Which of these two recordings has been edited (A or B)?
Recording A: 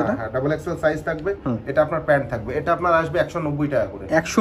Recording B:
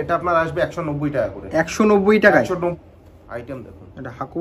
B